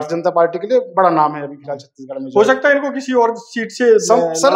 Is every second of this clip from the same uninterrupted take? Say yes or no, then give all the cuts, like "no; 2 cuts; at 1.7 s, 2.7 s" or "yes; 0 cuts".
yes; 0 cuts